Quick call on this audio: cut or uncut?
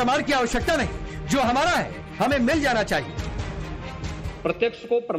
cut